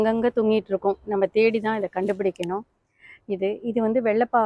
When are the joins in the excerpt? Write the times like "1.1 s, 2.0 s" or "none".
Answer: none